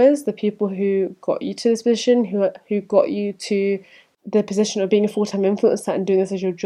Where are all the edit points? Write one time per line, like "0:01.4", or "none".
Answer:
none